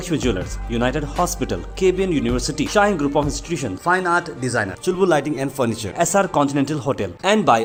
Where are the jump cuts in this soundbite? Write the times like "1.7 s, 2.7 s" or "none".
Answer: none

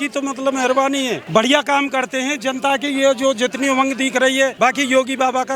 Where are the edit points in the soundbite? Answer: 1.2 s, 4.5 s

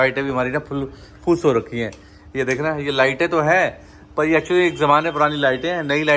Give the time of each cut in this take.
none

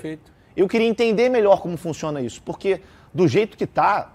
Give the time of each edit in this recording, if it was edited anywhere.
none

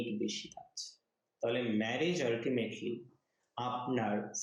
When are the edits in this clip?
none

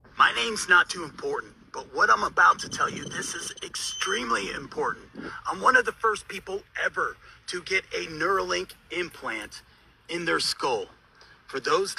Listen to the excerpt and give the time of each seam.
none

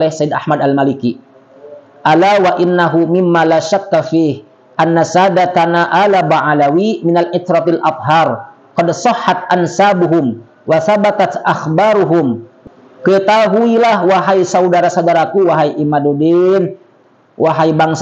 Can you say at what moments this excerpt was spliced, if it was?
12.5 s

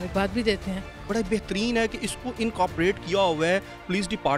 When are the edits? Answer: 1.0 s

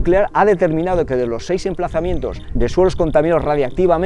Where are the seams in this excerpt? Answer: 2.4 s

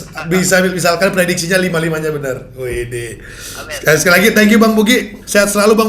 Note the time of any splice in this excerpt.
none

